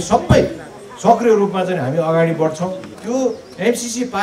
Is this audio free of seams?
no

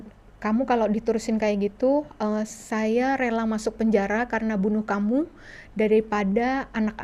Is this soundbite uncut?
yes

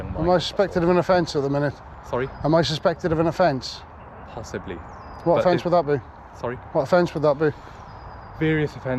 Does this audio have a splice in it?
no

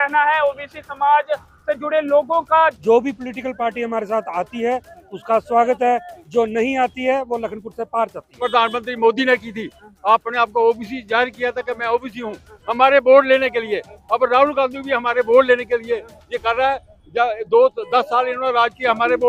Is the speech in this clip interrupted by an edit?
yes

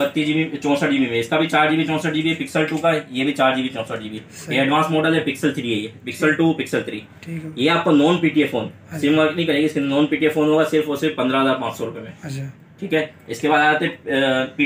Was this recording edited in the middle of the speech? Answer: no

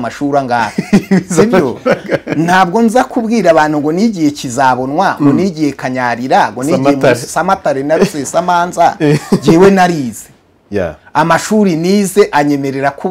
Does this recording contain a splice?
no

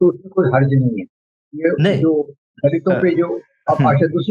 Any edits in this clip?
no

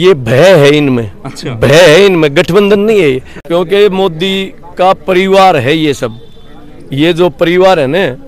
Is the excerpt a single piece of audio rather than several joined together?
no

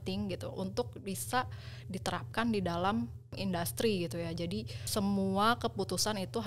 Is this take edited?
no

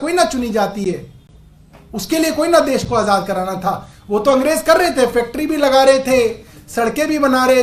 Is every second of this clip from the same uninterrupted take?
yes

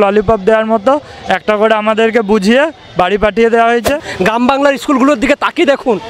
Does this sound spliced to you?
yes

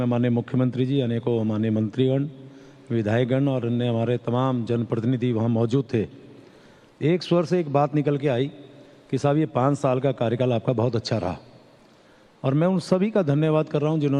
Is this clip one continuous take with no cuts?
yes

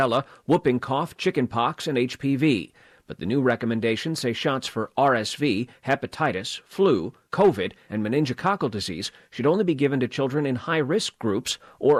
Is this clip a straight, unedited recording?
yes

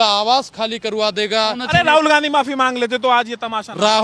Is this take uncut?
no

